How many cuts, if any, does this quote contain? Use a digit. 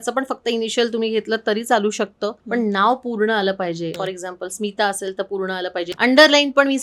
3